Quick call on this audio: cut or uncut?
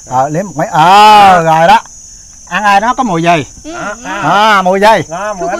uncut